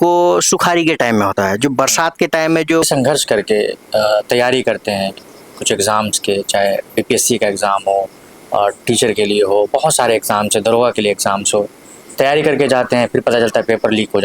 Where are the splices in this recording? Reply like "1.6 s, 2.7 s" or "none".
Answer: 2.9 s